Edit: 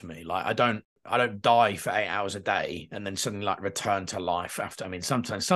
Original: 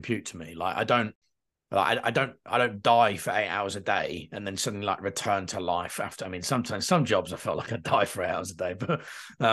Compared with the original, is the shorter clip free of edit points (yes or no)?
no